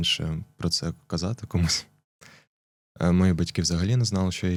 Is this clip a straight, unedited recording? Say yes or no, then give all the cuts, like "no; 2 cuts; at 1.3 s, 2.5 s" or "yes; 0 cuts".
yes; 0 cuts